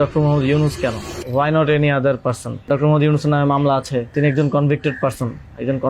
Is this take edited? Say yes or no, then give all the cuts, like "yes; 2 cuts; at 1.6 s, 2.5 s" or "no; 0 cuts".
yes; 3 cuts; at 1.1 s, 2.7 s, 4.1 s